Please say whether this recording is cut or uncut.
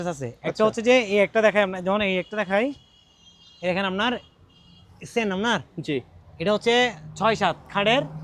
uncut